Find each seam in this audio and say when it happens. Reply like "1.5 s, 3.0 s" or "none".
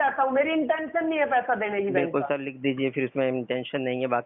none